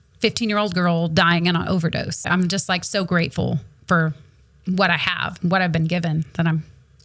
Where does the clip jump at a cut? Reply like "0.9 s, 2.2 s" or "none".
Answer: 2.3 s